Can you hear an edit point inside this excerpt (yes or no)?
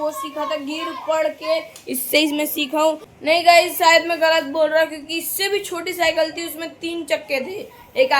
no